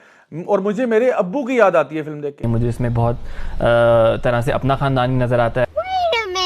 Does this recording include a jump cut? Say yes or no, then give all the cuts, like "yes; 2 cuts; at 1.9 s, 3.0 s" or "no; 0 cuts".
yes; 1 cut; at 2.4 s